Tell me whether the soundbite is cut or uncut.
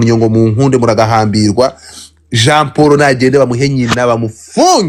uncut